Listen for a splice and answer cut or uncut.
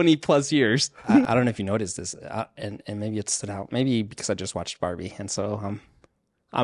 cut